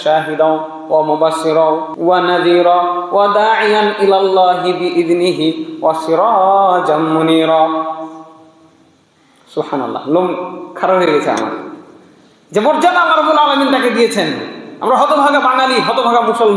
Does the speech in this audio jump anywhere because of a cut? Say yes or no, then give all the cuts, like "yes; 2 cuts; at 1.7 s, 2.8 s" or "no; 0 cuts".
yes; 1 cut; at 1.9 s